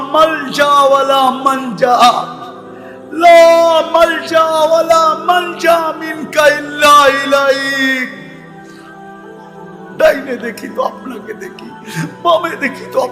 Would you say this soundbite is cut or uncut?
cut